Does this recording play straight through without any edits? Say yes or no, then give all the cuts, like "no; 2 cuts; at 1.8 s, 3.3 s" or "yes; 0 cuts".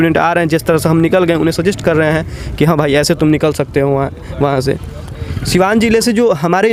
yes; 0 cuts